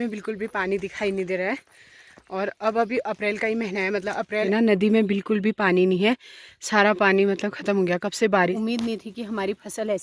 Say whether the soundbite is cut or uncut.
cut